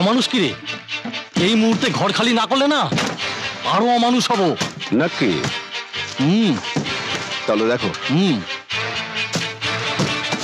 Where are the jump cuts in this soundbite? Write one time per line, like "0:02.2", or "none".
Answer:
none